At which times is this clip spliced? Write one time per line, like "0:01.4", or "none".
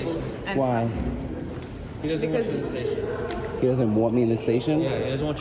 none